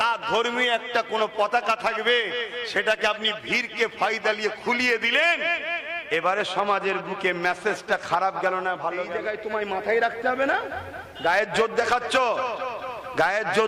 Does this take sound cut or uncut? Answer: cut